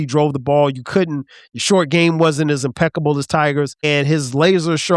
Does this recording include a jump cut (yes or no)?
yes